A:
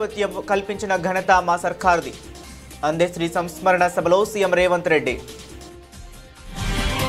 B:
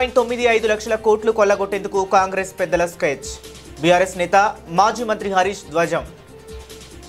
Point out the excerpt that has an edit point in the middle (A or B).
A